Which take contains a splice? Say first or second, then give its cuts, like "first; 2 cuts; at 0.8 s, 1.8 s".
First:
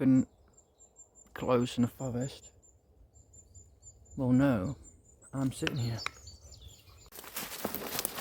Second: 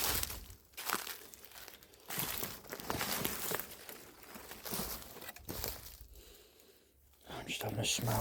first; 1 cut; at 7.1 s